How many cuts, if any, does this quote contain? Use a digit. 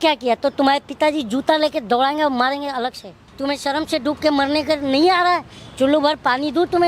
1